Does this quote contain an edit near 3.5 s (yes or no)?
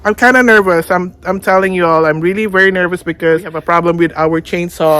yes